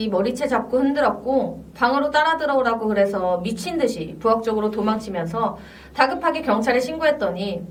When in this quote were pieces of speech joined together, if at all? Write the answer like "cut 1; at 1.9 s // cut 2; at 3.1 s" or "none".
none